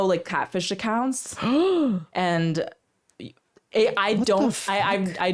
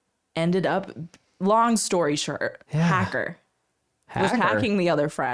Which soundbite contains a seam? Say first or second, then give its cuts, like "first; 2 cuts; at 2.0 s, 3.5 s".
second; 1 cut; at 1.2 s